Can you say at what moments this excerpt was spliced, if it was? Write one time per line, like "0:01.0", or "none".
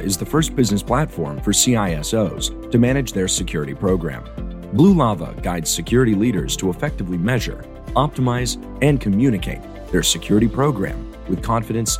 none